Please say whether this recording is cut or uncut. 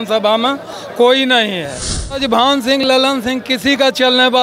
cut